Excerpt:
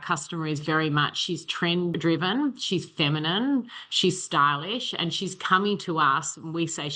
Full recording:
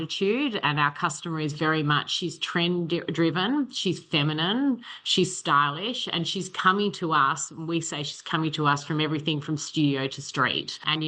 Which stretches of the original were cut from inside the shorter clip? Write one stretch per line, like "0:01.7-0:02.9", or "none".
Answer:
0:02.9-0:03.1

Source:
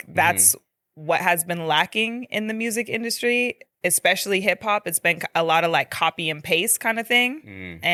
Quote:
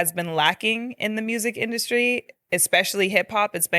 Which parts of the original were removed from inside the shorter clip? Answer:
none

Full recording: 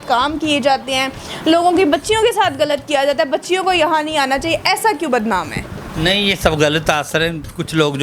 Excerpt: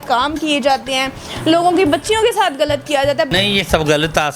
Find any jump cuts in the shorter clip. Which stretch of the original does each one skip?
0:03.3-0:06.0

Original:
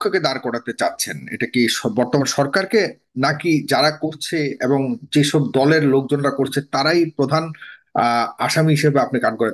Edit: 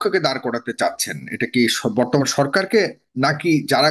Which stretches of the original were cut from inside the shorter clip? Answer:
none

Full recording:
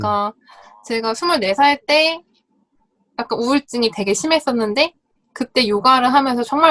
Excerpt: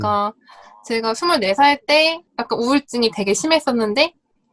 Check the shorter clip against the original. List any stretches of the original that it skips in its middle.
0:02.3-0:03.1

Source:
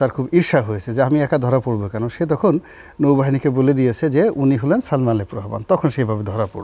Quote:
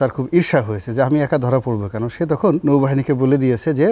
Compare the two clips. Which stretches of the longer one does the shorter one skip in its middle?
0:02.6-0:03.0

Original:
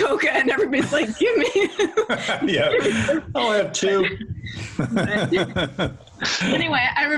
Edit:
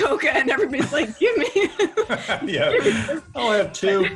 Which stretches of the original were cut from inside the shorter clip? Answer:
none

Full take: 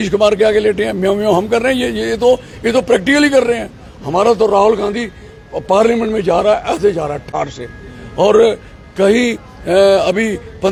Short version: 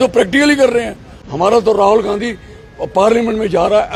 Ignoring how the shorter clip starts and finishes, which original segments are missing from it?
none

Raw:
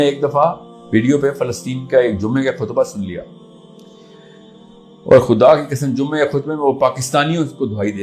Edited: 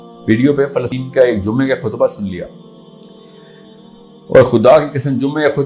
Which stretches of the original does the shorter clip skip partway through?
0:01.6-0:01.7

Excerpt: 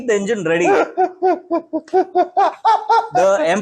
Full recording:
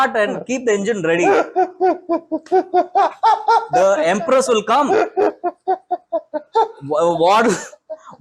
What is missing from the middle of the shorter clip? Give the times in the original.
none

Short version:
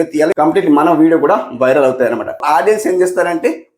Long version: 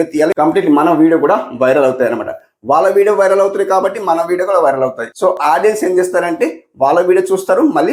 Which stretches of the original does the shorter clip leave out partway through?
0:02.4-0:05.4

